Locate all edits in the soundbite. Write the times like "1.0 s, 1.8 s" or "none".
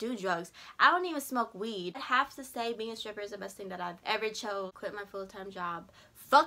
2.0 s, 4.7 s